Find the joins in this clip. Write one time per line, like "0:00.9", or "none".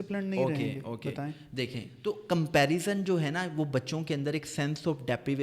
0:01.9